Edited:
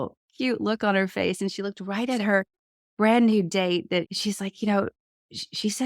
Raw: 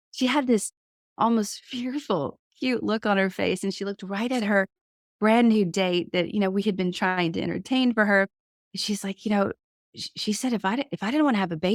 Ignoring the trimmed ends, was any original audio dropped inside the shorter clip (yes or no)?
yes